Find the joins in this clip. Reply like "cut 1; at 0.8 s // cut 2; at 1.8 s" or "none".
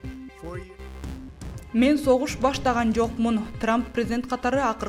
none